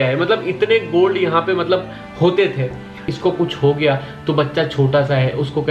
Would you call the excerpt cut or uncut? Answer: cut